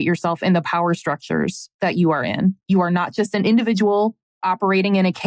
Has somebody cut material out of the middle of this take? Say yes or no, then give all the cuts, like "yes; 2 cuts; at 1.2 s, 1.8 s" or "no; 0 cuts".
yes; 2 cuts; at 2.6 s, 4.2 s